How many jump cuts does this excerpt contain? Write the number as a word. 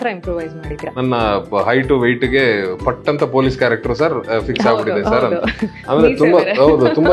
one